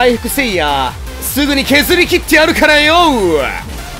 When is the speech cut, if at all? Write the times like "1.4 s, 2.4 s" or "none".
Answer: none